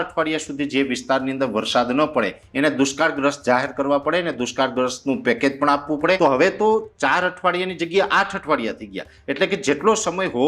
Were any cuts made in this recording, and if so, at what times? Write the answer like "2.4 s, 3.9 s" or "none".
6.2 s